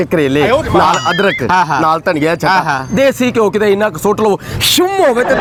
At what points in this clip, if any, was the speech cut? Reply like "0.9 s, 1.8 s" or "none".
none